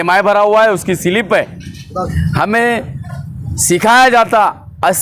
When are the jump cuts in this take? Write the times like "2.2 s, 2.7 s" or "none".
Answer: 2.1 s